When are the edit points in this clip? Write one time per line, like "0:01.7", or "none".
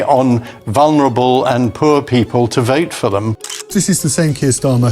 0:03.4

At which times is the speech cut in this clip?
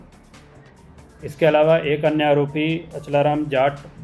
none

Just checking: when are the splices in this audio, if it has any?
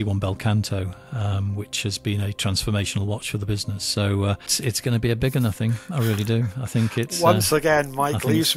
0:04.5

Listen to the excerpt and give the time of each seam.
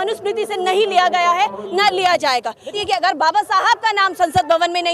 0:02.7

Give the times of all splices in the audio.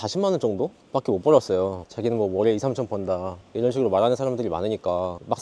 0:01.9

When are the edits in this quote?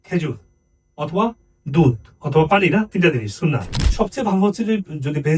0:03.8

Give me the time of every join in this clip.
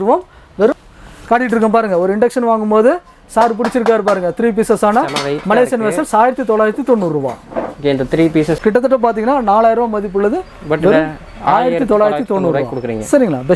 0:00.8
0:08.6

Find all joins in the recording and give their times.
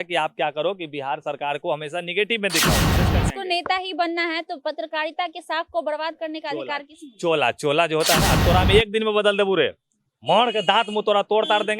0:03.0
0:08.4

